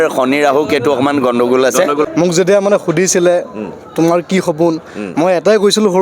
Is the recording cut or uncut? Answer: cut